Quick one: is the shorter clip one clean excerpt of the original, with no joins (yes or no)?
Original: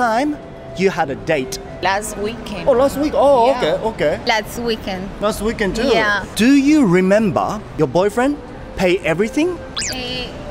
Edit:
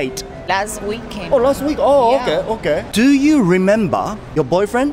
no